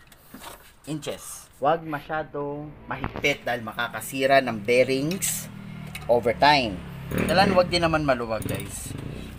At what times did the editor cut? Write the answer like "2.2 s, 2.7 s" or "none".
1.2 s, 7.0 s